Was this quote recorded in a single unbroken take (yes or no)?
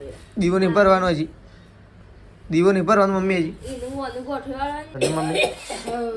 no